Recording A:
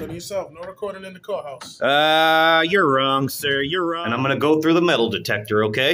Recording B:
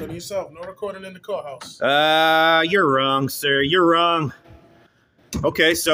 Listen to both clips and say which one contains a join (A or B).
A